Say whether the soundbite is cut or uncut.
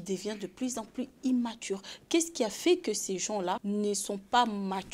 uncut